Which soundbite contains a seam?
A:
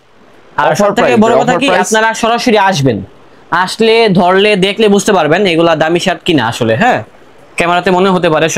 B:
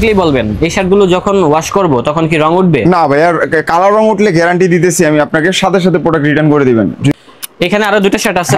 B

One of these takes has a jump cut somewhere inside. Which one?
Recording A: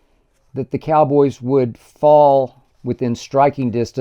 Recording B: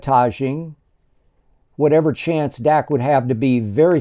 A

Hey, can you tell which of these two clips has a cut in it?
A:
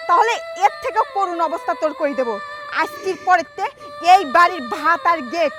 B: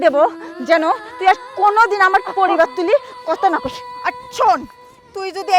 B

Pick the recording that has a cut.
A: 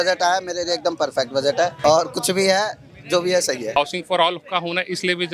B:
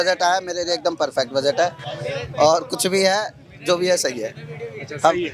A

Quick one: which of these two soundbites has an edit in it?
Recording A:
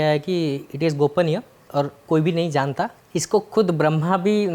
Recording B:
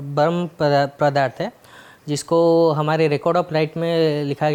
A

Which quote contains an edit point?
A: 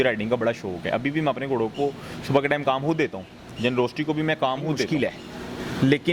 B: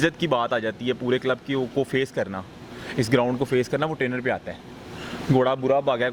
A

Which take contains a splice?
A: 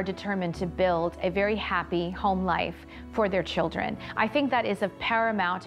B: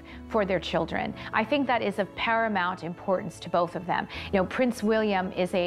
B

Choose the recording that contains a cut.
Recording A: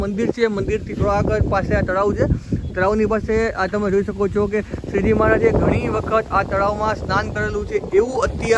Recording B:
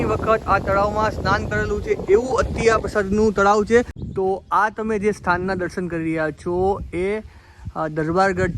B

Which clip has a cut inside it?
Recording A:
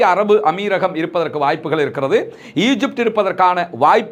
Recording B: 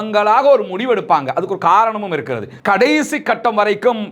B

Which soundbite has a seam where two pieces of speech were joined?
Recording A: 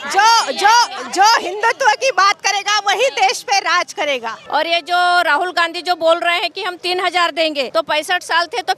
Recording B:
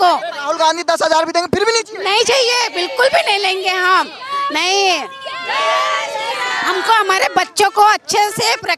A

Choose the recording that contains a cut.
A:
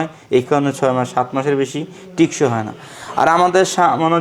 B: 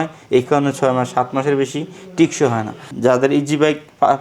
B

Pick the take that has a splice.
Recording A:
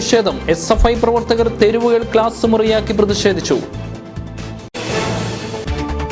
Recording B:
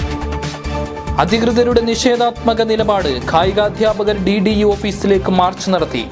B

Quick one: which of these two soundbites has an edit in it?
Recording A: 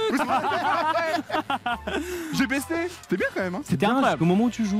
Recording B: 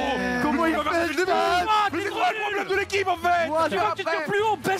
A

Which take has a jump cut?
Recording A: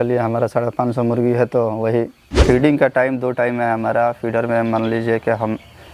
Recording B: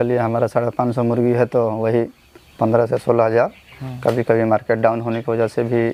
A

